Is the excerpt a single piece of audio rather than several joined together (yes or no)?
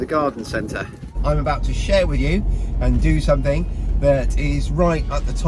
no